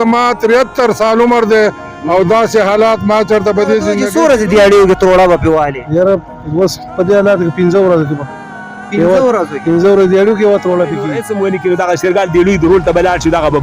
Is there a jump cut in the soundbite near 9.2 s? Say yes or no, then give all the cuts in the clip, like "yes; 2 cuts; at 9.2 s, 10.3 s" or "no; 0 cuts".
no; 2 cuts; at 4.0 s, 11.2 s